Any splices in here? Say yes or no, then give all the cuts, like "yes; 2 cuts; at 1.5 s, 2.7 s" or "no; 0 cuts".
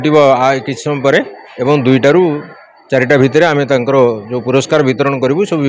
no; 0 cuts